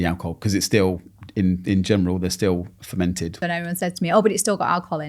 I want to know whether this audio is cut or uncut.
cut